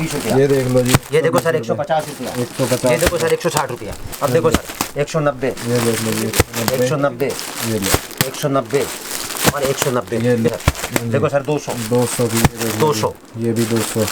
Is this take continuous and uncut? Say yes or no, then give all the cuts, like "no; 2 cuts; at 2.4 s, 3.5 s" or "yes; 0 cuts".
no; 2 cuts; at 4.1 s, 10.5 s